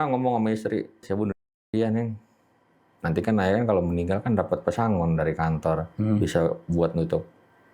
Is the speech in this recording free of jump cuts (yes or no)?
yes